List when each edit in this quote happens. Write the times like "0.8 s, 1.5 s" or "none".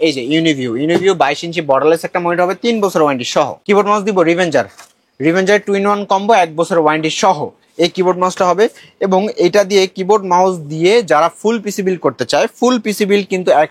none